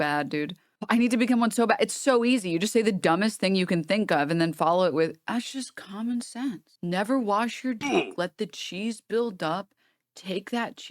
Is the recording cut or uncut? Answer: cut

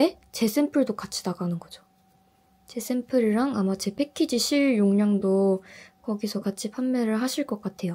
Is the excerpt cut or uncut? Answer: uncut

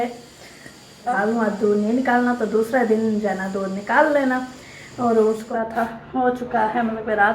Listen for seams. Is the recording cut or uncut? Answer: cut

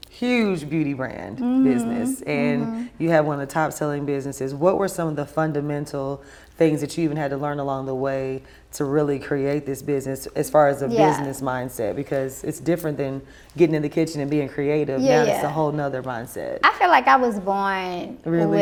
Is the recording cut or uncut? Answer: uncut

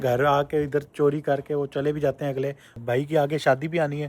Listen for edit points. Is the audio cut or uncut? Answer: cut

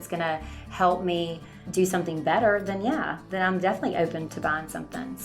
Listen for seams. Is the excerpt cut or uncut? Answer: cut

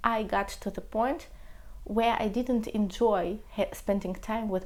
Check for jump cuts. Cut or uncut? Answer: uncut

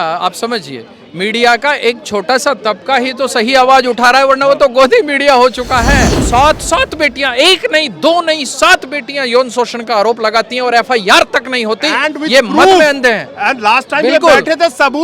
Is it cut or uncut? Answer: cut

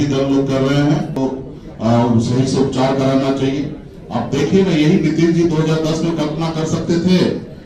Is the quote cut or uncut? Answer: cut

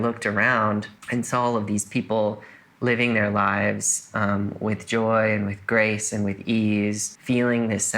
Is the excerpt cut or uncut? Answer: cut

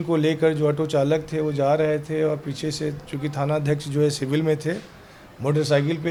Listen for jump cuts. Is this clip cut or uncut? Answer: uncut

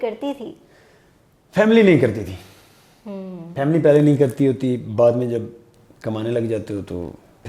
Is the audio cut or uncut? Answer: uncut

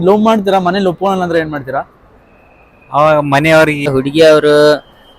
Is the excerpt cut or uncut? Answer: cut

